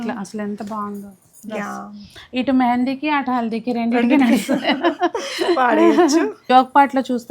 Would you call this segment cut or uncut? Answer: cut